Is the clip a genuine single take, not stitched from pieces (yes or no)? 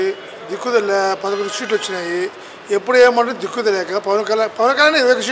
yes